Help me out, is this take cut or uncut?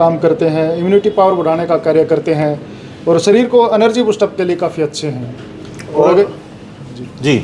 uncut